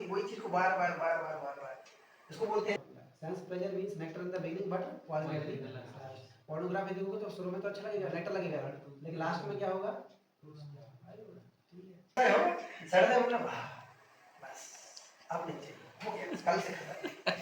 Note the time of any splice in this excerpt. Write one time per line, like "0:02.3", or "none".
0:02.8
0:12.2